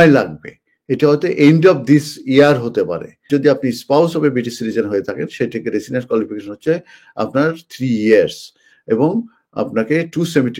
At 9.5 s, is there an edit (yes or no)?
no